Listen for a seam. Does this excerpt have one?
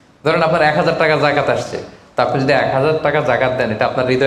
no; 0 cuts

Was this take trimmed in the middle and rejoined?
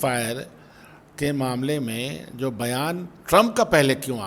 no; 0 cuts

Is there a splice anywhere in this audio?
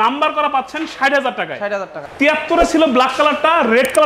yes; 1 cut; at 2.0 s

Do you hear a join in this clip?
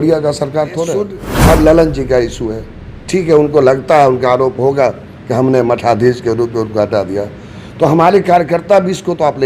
yes; 1 cut; at 1.2 s

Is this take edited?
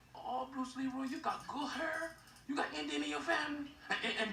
no; 0 cuts

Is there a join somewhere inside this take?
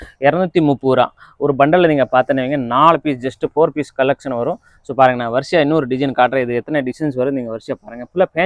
no; 0 cuts

